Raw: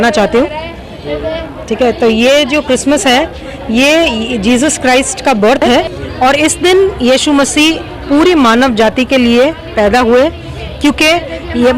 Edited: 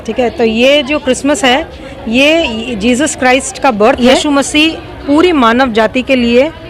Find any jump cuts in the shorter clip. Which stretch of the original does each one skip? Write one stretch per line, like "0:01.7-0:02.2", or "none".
0:05.6-0:07.0